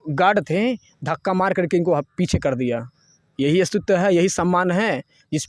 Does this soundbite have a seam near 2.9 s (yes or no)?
no